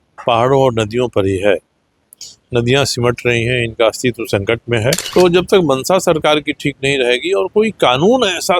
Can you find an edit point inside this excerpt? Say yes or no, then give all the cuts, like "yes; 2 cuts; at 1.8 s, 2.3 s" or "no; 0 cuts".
yes; 1 cut; at 5.0 s